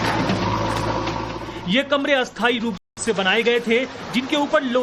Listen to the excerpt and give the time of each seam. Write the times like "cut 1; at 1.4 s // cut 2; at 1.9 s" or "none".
none